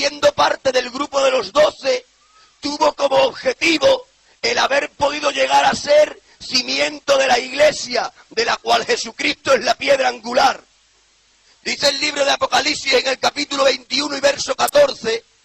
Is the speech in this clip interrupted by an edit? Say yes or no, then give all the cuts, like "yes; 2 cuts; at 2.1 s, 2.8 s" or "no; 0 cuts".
yes; 1 cut; at 3.9 s